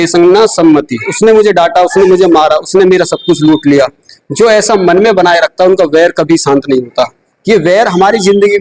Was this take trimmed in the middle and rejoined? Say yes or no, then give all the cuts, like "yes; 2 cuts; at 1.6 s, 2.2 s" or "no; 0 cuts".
yes; 1 cut; at 1.1 s